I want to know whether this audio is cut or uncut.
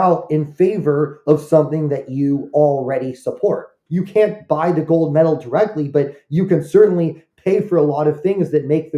cut